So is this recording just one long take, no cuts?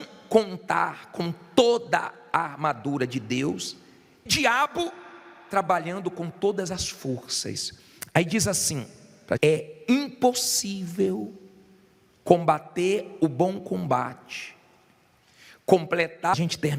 yes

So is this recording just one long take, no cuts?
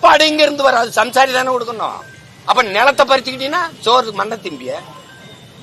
yes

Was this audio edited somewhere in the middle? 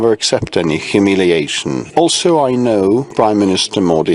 yes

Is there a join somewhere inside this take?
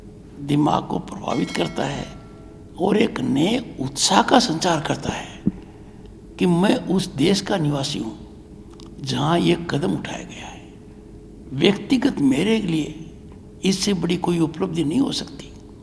no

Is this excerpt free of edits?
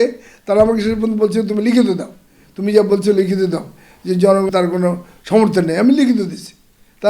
no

